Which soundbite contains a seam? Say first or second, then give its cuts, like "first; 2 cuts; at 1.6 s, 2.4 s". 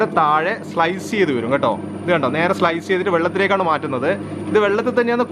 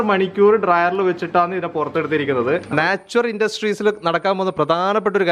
second; 1 cut; at 2.7 s